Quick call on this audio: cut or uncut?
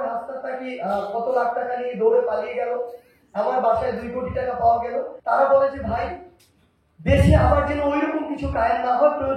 cut